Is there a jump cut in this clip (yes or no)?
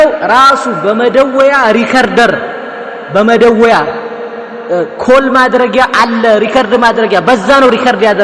no